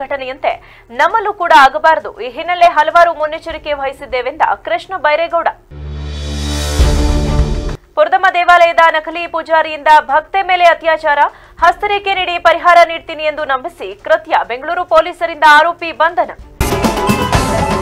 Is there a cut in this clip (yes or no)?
yes